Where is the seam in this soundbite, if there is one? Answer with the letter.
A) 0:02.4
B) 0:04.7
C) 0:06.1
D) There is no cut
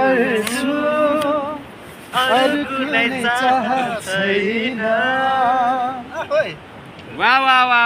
D